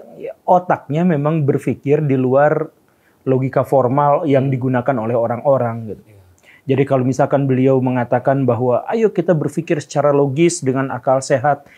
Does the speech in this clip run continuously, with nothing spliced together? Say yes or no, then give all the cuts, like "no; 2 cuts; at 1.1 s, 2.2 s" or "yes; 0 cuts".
yes; 0 cuts